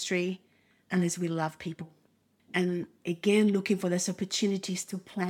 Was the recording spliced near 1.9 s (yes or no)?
yes